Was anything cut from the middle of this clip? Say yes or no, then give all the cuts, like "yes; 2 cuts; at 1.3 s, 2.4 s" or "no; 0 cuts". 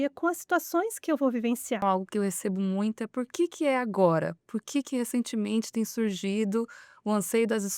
yes; 1 cut; at 1.8 s